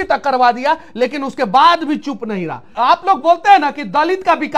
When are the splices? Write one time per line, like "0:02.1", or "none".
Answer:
0:02.7